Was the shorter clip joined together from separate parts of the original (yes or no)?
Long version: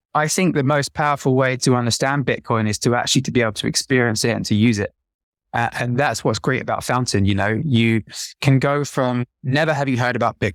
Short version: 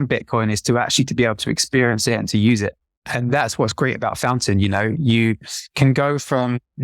yes